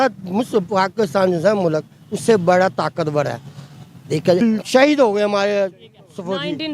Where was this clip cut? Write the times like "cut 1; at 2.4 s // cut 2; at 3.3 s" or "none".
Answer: cut 1; at 4.4 s